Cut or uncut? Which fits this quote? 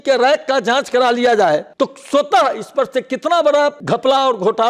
cut